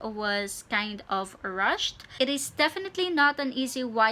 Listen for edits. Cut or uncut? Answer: cut